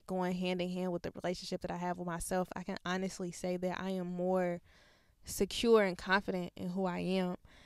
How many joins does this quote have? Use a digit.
0